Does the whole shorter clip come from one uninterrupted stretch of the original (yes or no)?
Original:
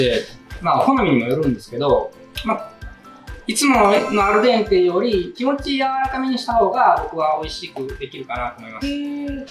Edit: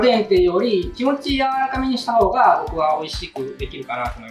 yes